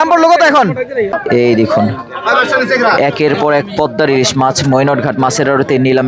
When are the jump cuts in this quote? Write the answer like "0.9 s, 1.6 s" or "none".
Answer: 1.2 s

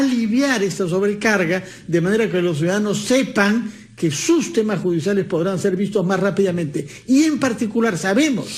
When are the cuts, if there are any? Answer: 2.8 s

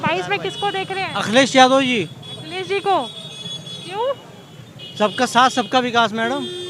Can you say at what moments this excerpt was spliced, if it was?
none

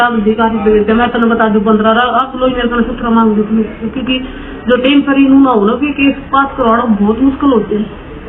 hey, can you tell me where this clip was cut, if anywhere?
none

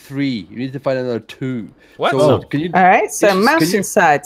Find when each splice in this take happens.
none

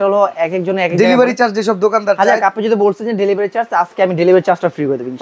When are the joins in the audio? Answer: none

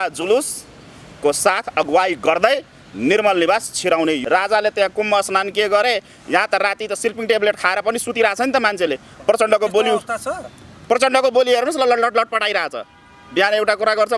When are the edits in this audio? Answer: 4.2 s

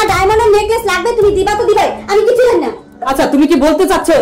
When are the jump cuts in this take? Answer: none

